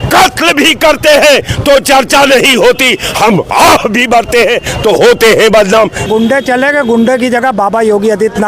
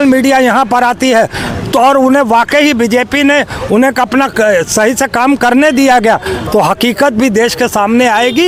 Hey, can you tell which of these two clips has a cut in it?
first; 1 cut; at 6.0 s

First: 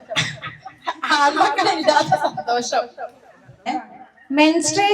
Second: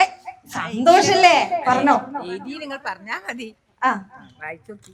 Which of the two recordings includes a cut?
first; 1 cut; at 3.6 s

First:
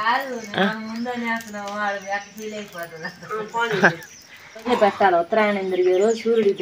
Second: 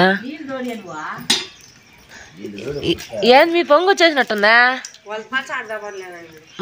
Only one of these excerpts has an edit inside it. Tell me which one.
first; 1 cut; at 4.7 s

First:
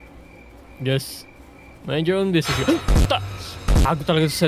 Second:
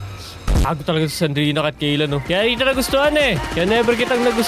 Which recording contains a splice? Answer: second; 2 cuts; at 2.2 s, 3.4 s

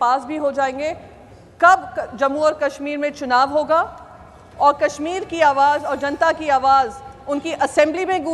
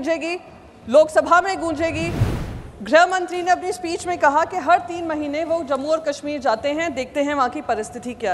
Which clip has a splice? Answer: second; 1 cut; at 2.2 s

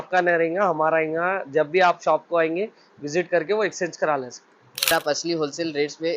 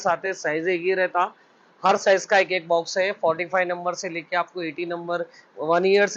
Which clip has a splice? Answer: first; 1 cut; at 4.9 s

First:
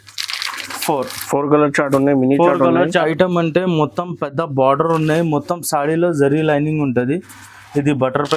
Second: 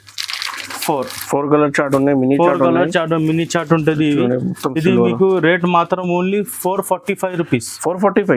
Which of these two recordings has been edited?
first; 1 cut; at 3.0 s

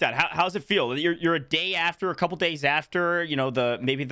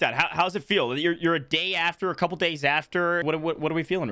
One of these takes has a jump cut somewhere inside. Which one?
second; 1 cut; at 3.2 s

